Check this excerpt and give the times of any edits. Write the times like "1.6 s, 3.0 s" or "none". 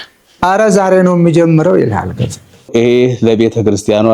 2.7 s